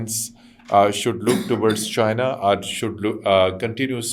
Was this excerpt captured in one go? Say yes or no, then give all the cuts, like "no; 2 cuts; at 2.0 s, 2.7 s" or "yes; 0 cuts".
yes; 0 cuts